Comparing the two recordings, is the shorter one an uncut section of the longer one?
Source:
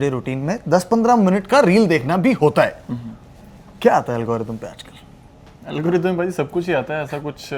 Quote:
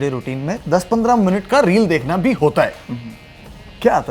yes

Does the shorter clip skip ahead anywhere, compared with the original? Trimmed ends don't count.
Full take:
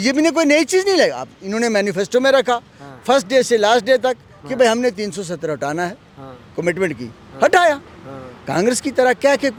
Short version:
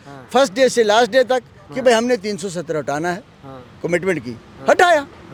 no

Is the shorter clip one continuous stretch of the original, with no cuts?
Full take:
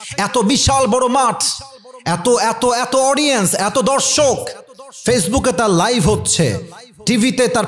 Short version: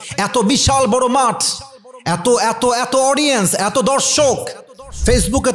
yes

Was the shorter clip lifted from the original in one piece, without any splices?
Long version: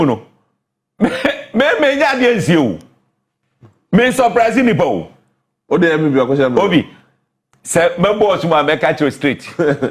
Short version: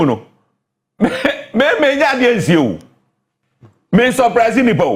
yes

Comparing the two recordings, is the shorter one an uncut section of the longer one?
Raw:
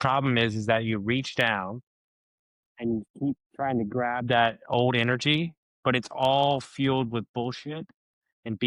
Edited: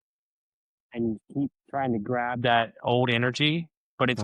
yes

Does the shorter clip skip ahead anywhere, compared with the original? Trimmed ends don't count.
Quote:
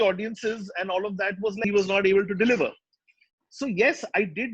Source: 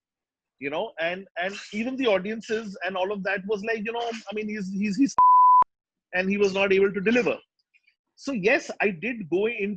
yes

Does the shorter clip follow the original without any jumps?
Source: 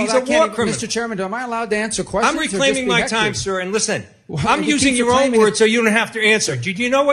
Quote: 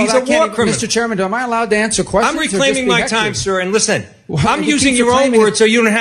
yes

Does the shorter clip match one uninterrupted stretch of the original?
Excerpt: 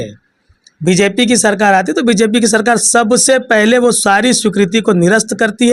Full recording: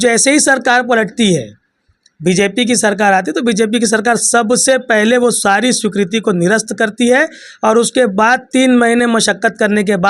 yes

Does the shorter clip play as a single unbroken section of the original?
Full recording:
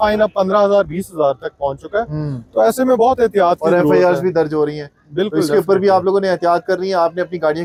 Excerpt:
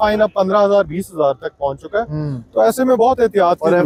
yes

